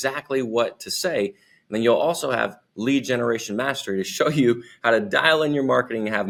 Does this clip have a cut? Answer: no; 0 cuts

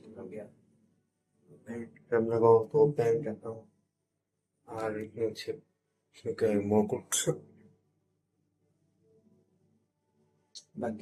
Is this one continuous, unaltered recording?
yes; 0 cuts

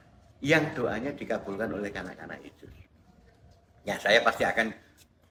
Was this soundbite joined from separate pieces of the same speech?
no; 0 cuts

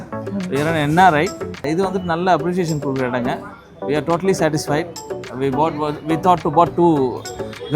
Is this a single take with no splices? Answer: no; 1 cut; at 1.6 s

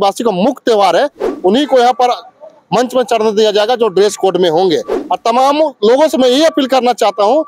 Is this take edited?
yes; 2 cuts; at 1.3 s, 5.0 s

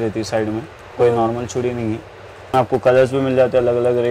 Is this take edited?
yes; 1 cut; at 2.5 s

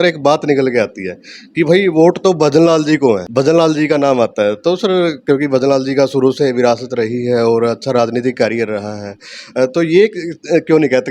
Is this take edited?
yes; 1 cut; at 3.2 s

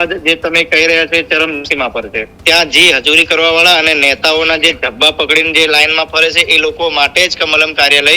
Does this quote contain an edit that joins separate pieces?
yes; 1 cut; at 2.3 s

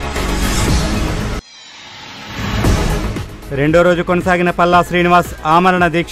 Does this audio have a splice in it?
no; 0 cuts

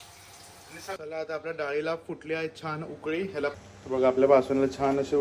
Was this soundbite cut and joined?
yes; 2 cuts; at 1.0 s, 3.6 s

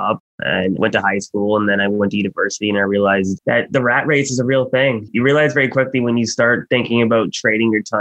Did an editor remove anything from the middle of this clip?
yes; 2 cuts; at 0.8 s, 5.1 s

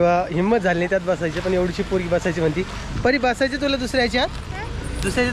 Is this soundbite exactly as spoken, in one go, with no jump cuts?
yes; 0 cuts

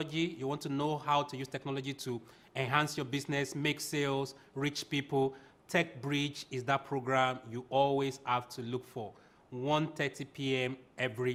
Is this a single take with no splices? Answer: yes; 0 cuts

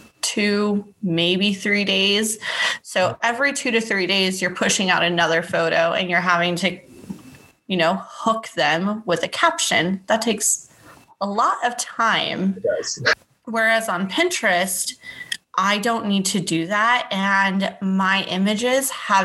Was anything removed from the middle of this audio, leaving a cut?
yes; 1 cut; at 13.2 s

